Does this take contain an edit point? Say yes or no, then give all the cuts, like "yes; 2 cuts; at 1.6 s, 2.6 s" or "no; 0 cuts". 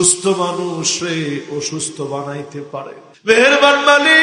yes; 1 cut; at 3.0 s